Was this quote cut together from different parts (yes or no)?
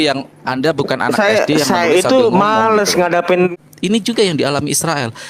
yes